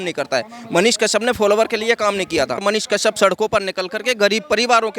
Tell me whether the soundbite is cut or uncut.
cut